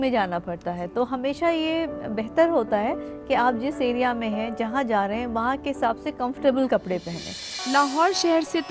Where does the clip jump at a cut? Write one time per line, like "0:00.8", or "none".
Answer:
0:07.5